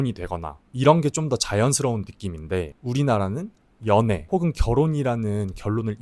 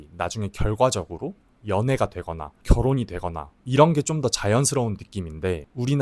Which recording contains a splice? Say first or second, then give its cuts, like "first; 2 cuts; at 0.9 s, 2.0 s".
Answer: first; 1 cut; at 4.2 s